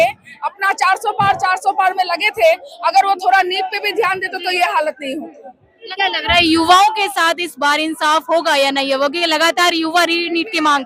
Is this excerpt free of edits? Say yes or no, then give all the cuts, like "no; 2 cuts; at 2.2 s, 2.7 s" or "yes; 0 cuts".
yes; 0 cuts